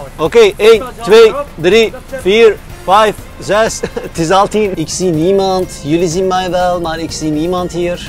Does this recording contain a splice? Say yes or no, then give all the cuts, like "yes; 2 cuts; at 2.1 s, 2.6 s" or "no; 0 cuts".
yes; 1 cut; at 4.8 s